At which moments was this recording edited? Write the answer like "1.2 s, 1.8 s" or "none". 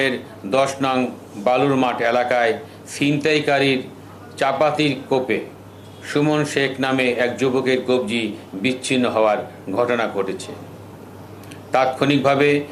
none